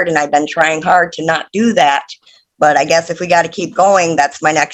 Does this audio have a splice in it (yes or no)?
no